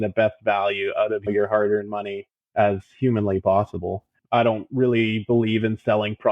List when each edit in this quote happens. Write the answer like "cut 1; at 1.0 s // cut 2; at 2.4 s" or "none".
cut 1; at 4.1 s